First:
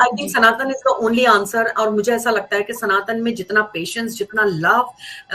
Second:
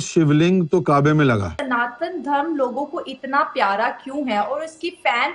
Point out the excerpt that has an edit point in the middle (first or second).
second